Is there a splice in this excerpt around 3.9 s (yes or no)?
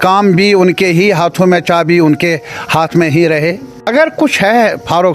yes